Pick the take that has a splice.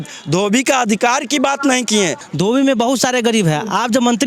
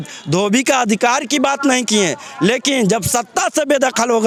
first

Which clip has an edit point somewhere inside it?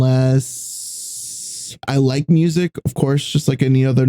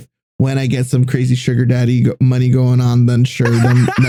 first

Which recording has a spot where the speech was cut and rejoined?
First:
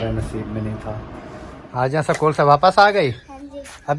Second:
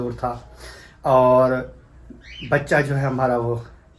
first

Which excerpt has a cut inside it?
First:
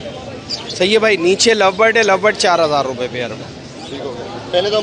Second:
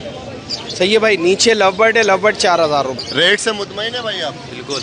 second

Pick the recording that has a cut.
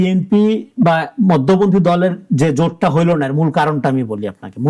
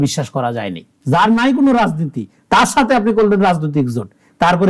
second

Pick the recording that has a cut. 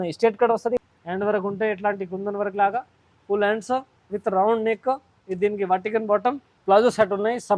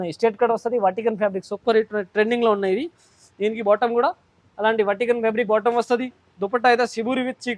first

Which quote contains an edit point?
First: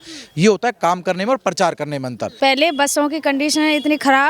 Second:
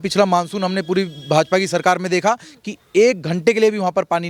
first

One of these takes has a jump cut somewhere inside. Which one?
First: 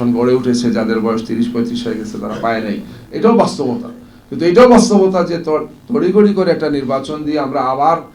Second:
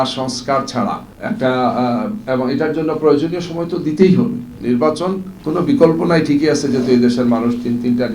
second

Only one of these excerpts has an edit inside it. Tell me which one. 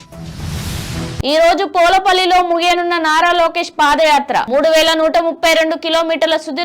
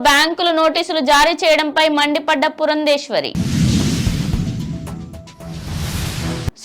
first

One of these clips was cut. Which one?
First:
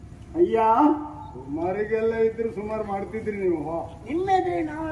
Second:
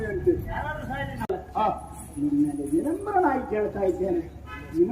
second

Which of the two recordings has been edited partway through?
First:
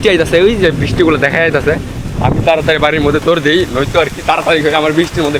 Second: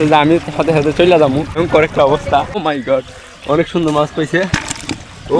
second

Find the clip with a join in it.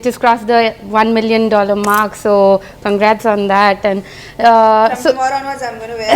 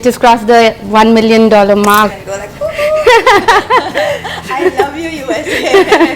second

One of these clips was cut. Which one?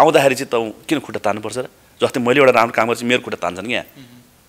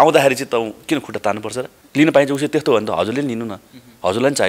second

